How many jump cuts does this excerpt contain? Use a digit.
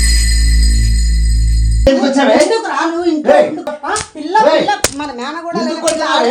0